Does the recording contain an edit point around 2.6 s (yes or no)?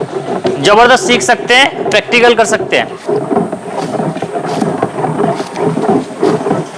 yes